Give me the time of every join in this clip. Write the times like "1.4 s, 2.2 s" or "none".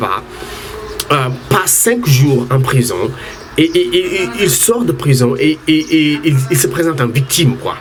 none